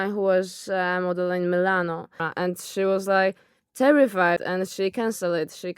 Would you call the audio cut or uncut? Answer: cut